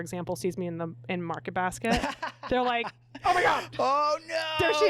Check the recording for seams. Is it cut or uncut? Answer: uncut